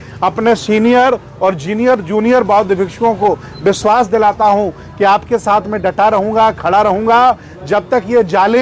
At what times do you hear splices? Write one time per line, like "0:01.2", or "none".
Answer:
none